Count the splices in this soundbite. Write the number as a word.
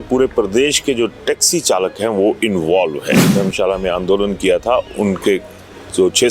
one